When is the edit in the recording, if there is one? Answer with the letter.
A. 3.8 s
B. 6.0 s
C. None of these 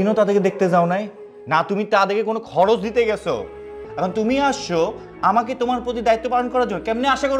A